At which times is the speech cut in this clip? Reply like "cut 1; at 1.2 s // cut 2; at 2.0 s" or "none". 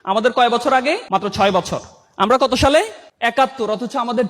cut 1; at 1.0 s // cut 2; at 3.0 s

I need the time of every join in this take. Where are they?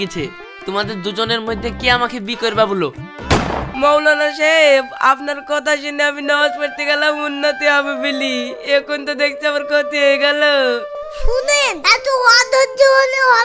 cut 1; at 3.7 s // cut 2; at 10.9 s

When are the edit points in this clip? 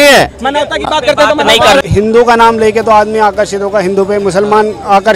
cut 1; at 1.8 s

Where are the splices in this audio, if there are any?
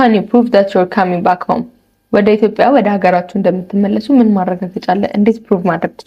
none

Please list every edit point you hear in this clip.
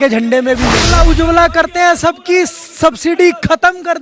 cut 1; at 0.9 s

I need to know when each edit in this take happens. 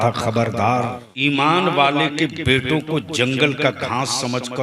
cut 1; at 1.0 s

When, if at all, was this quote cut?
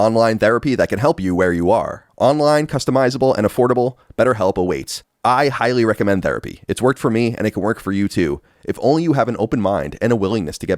cut 1; at 2.0 s

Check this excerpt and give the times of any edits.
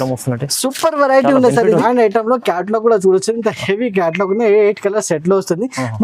cut 1; at 1.8 s

